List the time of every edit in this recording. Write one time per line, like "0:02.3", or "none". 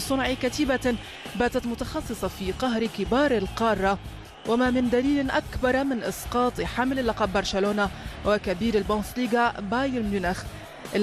none